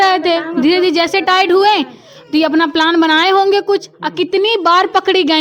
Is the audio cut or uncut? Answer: uncut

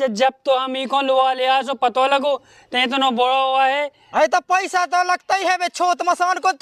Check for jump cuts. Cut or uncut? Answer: cut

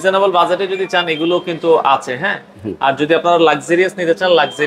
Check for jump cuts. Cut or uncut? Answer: uncut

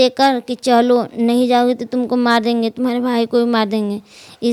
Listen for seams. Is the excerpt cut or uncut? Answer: uncut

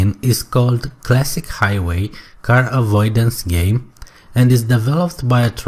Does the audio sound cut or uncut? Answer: uncut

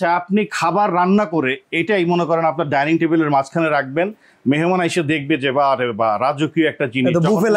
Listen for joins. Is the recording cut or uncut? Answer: uncut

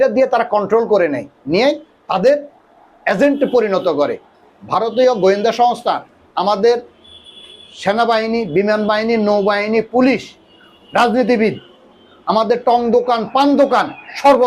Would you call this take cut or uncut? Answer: cut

